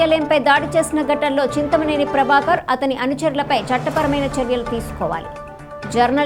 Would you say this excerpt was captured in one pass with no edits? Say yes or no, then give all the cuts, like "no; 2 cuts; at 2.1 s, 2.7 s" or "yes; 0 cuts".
yes; 0 cuts